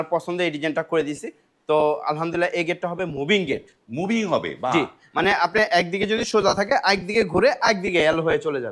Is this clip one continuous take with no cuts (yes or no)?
yes